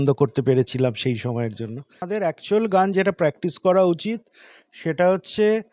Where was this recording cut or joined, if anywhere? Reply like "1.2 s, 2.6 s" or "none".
2.1 s